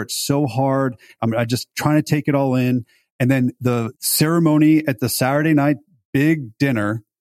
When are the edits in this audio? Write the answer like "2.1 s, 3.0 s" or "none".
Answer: 1.2 s, 3.6 s